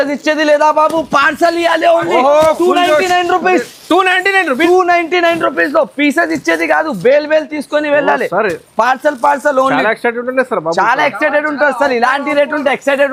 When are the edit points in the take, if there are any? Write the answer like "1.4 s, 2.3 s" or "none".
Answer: none